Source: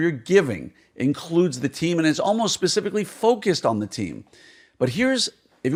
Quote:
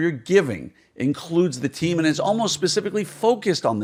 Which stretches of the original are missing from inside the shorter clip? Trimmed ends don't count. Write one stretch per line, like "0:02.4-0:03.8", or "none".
none